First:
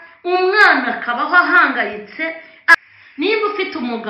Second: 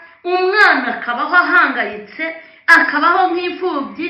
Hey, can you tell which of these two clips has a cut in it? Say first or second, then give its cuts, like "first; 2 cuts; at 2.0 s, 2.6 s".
first; 1 cut; at 2.7 s